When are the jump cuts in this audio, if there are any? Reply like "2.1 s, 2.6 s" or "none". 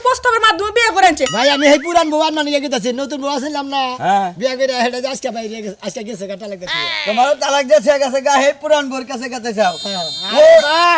1.3 s